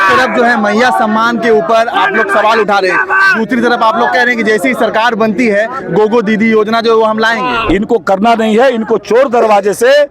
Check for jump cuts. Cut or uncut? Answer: cut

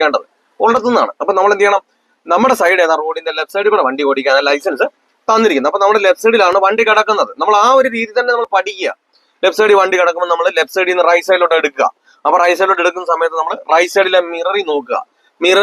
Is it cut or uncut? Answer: uncut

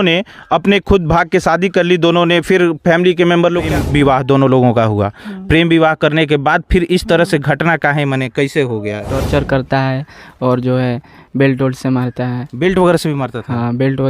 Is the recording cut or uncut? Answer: cut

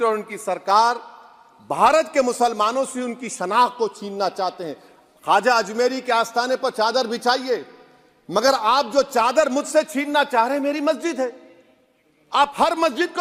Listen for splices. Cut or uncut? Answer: uncut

